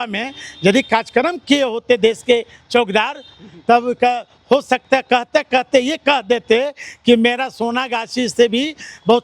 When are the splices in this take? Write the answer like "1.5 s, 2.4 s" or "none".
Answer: none